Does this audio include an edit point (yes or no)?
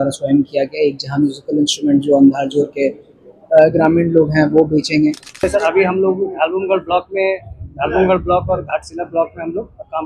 yes